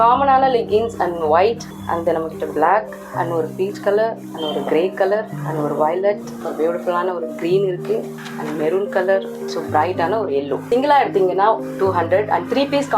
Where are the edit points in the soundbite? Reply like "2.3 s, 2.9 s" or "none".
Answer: 1.7 s, 3.0 s, 4.3 s, 5.4 s, 6.4 s, 8.2 s, 9.4 s, 10.6 s